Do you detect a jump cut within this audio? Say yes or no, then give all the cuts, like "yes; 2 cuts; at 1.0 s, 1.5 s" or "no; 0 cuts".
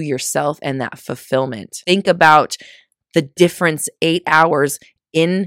yes; 1 cut; at 1.7 s